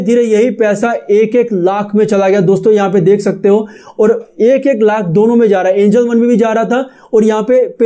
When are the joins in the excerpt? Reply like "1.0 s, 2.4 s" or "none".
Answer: none